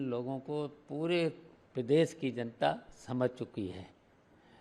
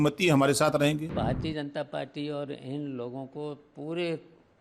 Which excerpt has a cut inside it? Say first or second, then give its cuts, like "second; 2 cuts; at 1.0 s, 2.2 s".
second; 1 cut; at 1.1 s